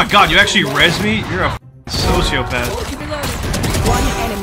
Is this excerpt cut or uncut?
cut